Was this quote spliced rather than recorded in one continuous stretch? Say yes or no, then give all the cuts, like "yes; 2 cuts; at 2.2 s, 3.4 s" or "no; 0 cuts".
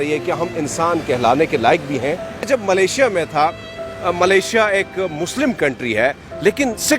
yes; 1 cut; at 2.5 s